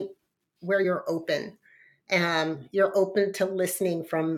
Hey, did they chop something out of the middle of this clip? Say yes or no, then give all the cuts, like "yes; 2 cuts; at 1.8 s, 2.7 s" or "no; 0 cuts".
no; 0 cuts